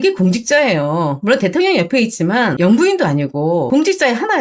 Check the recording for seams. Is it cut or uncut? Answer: uncut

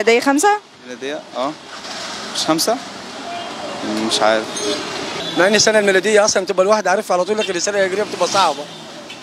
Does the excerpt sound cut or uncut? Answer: cut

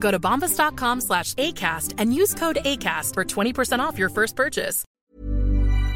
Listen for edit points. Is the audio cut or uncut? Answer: cut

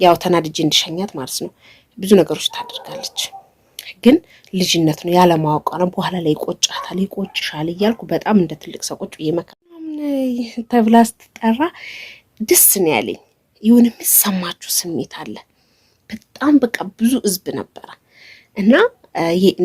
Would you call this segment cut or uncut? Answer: cut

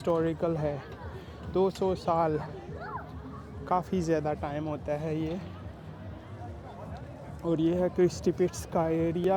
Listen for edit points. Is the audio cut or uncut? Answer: uncut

